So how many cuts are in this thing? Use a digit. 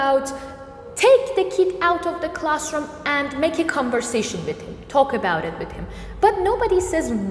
0